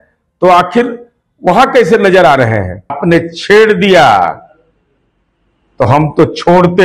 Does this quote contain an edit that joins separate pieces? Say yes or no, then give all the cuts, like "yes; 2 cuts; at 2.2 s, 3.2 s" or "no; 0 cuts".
yes; 1 cut; at 3.0 s